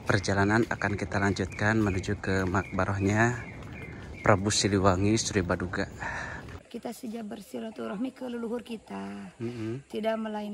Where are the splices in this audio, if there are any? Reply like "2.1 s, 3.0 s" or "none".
6.6 s